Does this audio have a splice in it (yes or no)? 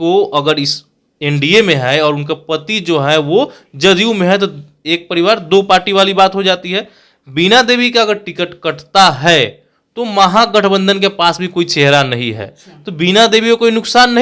no